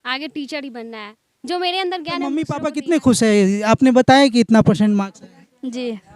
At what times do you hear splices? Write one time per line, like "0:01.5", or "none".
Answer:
0:02.5